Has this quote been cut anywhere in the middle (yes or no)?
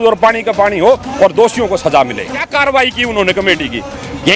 yes